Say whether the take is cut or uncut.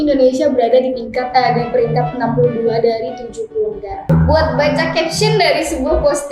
cut